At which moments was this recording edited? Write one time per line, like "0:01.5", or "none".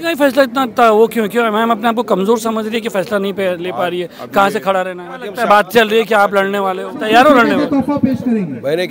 0:05.3
0:07.1